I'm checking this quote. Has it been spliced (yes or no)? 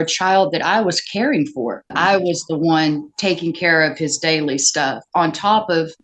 yes